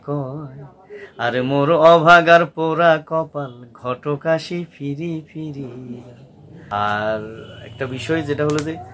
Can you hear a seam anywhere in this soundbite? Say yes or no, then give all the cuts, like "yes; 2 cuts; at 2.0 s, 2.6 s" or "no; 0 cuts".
no; 0 cuts